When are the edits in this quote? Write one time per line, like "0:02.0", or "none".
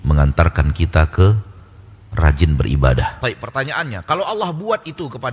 0:03.2